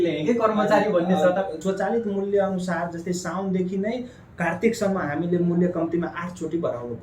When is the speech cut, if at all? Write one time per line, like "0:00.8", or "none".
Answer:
0:01.6